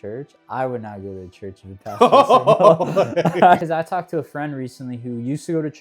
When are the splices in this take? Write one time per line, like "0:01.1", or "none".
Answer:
0:03.6